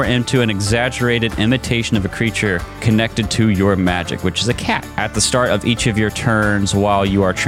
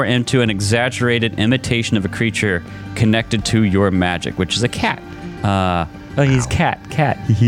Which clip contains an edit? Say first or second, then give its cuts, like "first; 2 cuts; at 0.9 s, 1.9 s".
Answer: first; 2 cuts; at 2.7 s, 4.9 s